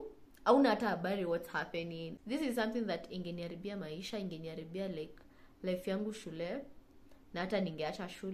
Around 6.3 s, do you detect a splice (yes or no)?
no